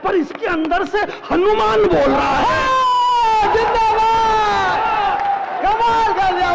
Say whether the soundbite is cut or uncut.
uncut